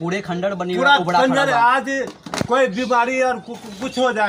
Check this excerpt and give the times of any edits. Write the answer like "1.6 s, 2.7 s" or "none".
none